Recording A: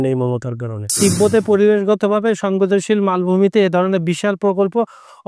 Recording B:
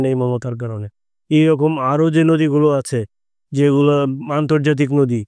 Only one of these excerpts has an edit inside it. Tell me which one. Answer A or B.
A